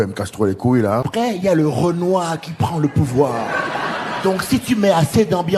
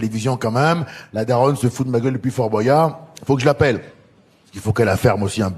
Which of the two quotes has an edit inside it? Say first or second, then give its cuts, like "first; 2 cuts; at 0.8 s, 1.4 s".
first; 1 cut; at 1.1 s